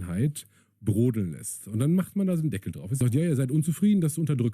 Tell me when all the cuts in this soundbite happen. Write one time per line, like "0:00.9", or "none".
0:02.8

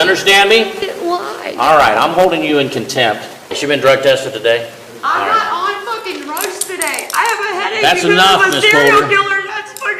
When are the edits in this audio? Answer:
0:03.5
0:04.8

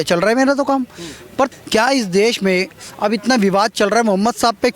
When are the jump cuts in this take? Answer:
0:01.5

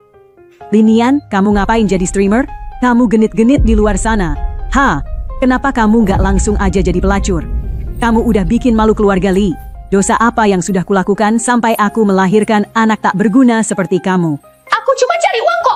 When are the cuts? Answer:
none

